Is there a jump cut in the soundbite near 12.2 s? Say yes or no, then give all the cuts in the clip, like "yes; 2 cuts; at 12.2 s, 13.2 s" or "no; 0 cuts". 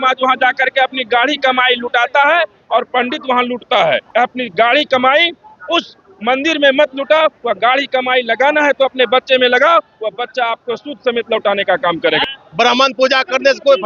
yes; 2 cuts; at 4.0 s, 12.2 s